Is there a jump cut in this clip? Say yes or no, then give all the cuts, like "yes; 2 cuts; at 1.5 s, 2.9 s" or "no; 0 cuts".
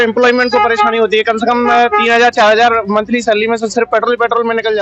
no; 0 cuts